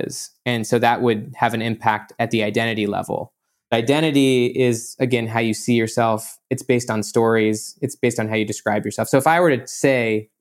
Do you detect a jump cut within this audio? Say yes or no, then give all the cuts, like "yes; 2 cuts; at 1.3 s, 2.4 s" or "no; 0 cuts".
yes; 1 cut; at 3.7 s